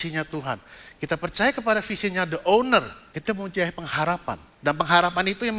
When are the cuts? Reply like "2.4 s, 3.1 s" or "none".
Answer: 3.0 s, 4.5 s